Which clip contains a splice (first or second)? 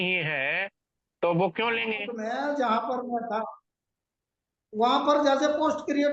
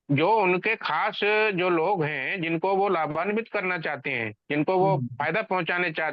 first